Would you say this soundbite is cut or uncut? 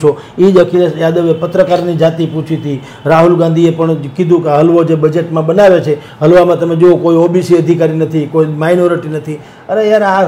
uncut